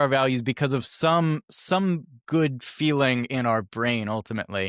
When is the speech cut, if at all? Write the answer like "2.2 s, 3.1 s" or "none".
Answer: none